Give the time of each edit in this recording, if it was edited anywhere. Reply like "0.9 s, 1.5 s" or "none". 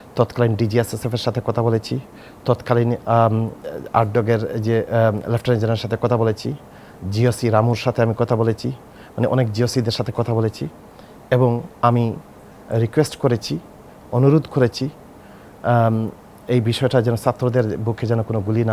none